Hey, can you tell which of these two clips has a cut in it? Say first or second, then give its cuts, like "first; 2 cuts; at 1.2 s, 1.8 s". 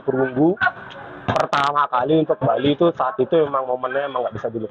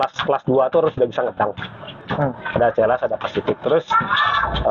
second; 1 cut; at 2.0 s